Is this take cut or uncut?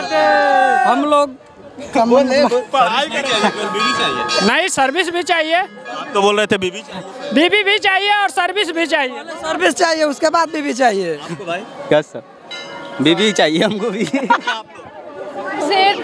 cut